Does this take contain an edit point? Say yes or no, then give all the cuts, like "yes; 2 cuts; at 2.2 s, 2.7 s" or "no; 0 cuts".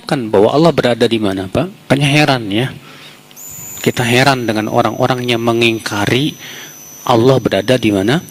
yes; 1 cut; at 1.9 s